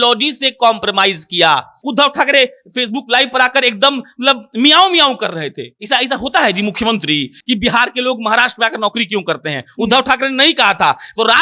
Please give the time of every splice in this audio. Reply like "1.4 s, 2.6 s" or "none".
1.8 s, 7.4 s